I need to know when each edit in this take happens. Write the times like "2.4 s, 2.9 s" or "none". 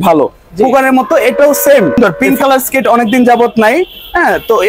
2.0 s